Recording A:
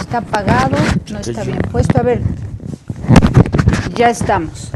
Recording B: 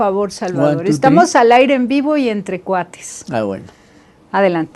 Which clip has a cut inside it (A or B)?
A